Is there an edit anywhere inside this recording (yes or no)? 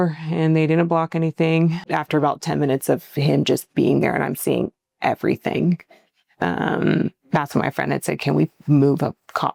no